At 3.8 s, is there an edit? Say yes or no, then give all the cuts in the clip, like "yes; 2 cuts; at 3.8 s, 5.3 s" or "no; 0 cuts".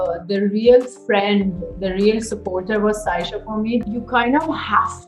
yes; 1 cut; at 3.8 s